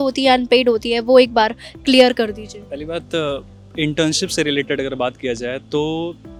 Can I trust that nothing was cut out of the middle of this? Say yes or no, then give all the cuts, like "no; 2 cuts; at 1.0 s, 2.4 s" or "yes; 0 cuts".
yes; 0 cuts